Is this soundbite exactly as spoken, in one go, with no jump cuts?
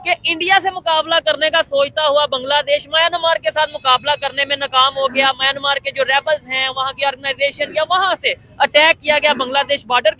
yes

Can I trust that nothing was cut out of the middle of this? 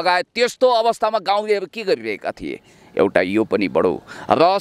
yes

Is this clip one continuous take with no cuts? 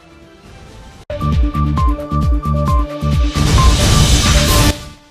yes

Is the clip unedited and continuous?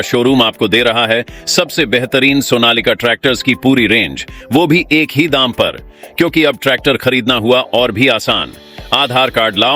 yes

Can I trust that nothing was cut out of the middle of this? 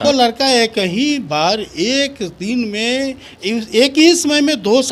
yes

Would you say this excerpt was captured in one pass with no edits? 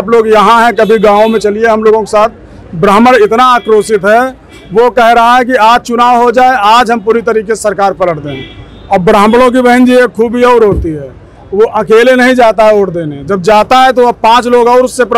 yes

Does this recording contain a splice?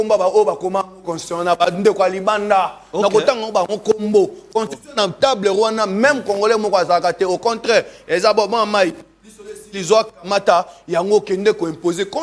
no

